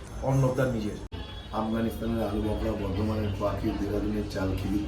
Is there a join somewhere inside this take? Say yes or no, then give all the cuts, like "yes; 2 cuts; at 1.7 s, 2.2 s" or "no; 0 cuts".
yes; 1 cut; at 1.1 s